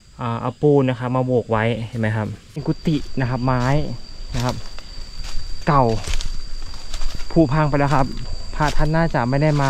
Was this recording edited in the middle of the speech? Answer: yes; 1 cut; at 2.6 s

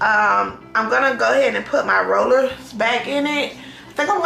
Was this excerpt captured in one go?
yes; 0 cuts

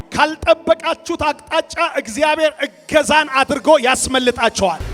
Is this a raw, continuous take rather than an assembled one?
yes; 0 cuts

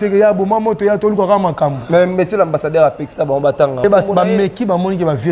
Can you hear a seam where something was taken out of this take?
yes; 1 cut; at 3.8 s

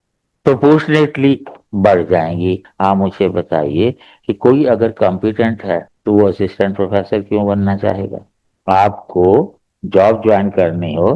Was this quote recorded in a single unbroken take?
no; 1 cut; at 2.7 s

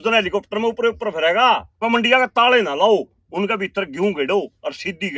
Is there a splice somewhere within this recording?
yes; 1 cut; at 1.8 s

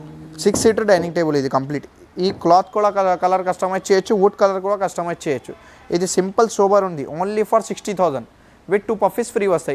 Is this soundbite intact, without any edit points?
yes; 0 cuts

